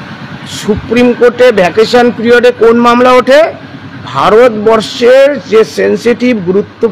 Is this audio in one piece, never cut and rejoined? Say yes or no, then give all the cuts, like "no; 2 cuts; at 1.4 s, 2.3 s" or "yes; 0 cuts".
yes; 0 cuts